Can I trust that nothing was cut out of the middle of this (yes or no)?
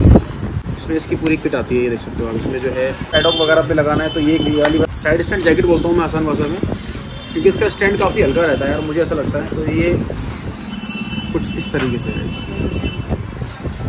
yes